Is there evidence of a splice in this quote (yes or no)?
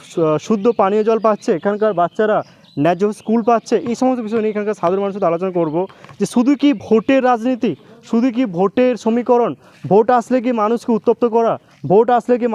no